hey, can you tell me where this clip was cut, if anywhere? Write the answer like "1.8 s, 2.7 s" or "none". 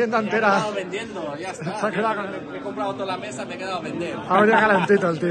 2.2 s